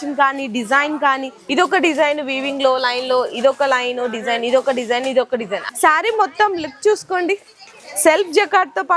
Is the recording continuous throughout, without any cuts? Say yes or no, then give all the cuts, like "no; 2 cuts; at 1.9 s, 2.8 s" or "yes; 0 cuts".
no; 2 cuts; at 1.3 s, 5.6 s